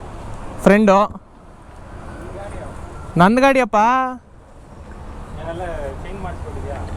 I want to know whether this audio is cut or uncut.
uncut